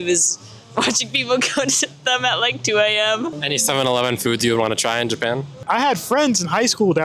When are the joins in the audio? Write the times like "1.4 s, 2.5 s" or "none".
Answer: 5.5 s